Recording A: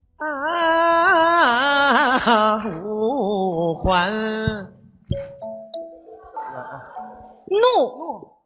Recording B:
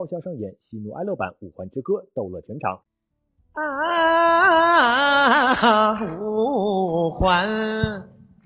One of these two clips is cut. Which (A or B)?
B